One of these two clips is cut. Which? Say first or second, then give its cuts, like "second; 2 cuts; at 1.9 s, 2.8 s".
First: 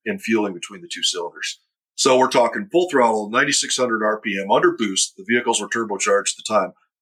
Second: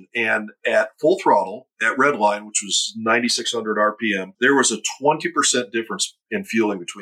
second; 1 cut; at 4.3 s